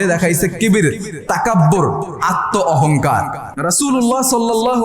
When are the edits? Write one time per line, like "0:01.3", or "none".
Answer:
0:03.5